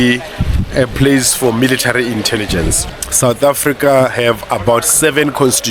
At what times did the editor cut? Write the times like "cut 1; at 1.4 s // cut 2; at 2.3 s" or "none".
cut 1; at 2.8 s